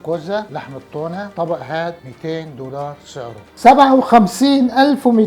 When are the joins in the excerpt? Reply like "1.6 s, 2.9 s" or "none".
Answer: 3.4 s